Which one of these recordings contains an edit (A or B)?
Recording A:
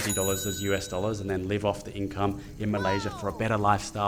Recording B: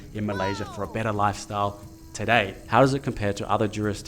B